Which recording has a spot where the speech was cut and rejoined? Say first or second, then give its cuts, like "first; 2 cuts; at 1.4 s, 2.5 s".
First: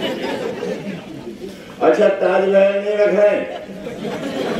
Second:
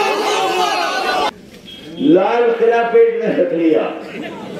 second; 1 cut; at 1.3 s